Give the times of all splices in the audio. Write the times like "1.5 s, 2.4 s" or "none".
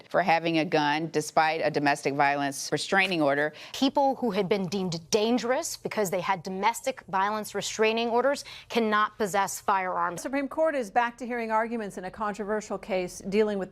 3.7 s, 10.2 s